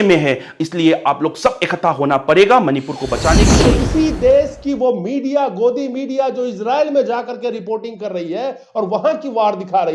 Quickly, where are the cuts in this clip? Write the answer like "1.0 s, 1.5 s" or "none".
3.5 s